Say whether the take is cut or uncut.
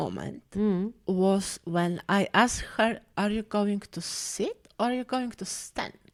uncut